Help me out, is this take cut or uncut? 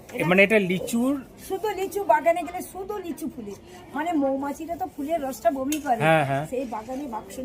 uncut